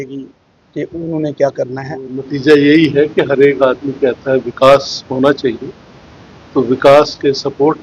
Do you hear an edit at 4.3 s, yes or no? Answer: no